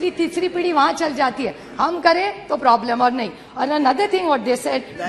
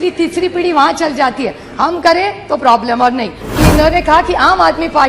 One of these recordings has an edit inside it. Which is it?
second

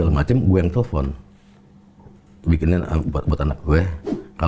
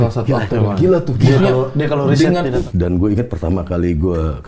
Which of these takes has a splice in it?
second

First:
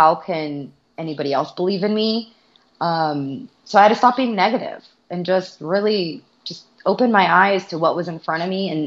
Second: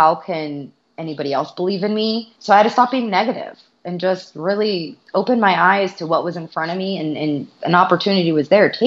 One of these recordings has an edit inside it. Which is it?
second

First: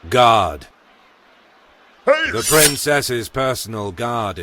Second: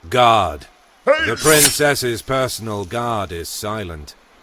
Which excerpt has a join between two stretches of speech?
second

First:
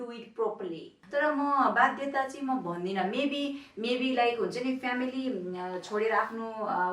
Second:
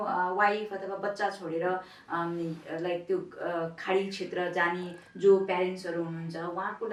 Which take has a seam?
first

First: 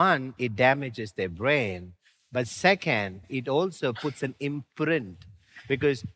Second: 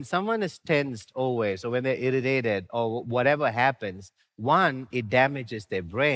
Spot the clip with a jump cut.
first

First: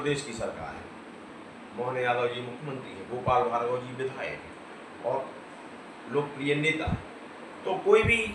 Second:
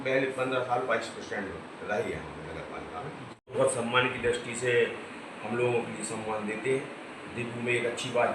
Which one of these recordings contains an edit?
second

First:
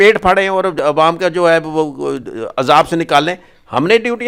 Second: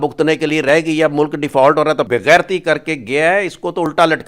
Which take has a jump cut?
second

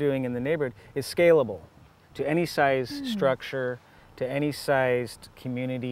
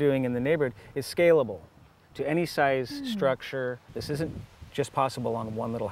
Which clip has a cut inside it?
second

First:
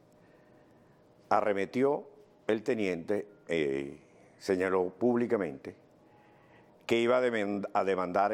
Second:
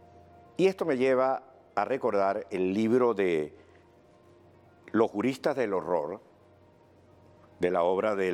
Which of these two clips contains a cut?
second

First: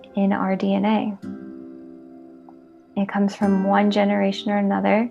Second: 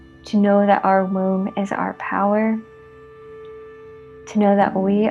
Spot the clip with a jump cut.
first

